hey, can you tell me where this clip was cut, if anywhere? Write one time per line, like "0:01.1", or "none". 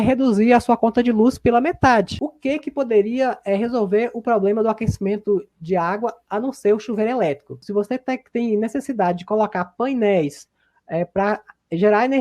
0:02.2
0:07.6